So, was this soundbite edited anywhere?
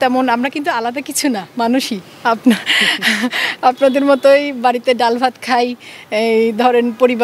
no; 0 cuts

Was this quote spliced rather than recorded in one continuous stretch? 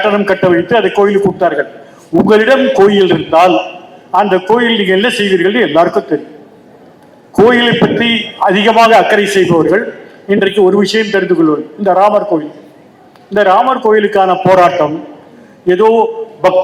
no; 0 cuts

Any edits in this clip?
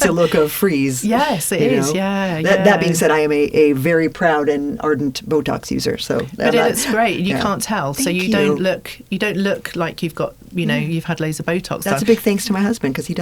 no; 0 cuts

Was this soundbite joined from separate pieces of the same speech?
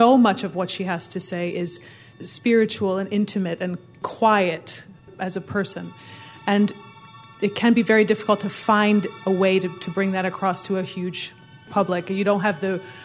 yes; 5 cuts; at 2.1 s, 3.9 s, 5.1 s, 7.2 s, 11.7 s

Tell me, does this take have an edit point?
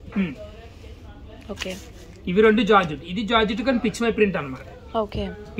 no; 0 cuts

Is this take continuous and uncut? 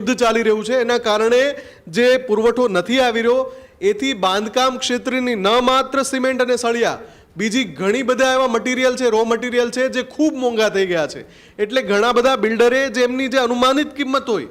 yes; 0 cuts

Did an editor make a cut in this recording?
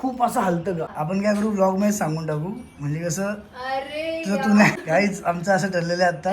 yes; 2 cuts; at 0.9 s, 4.7 s

